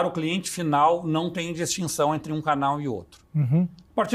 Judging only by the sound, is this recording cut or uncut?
uncut